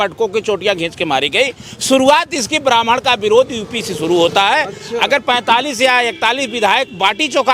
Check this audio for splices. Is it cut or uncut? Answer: uncut